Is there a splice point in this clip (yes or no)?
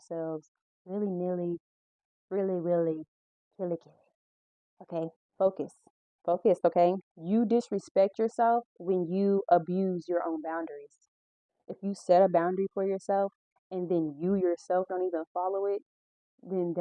yes